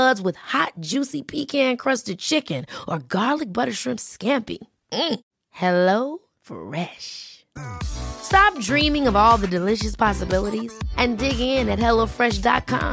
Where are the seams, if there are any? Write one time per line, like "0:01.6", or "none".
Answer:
none